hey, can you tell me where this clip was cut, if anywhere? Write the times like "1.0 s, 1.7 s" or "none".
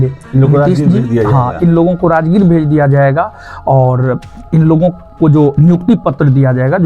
none

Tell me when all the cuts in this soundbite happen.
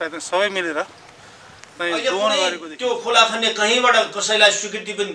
2.7 s

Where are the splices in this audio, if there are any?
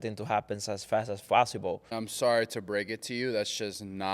2.0 s

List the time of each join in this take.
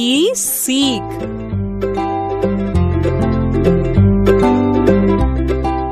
1.1 s

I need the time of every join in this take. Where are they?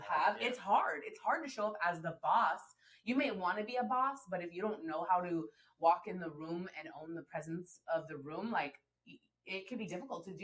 none

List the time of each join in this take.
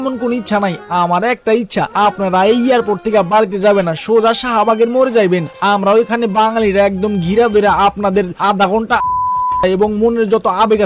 none

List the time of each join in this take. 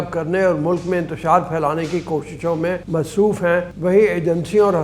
2.8 s, 3.7 s

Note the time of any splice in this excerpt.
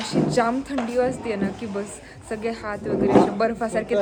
none

